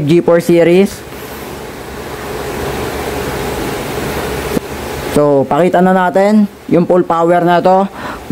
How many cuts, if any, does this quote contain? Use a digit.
1